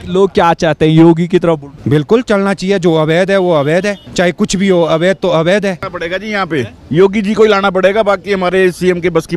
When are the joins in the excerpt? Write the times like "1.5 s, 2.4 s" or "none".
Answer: 1.7 s, 4.0 s, 5.9 s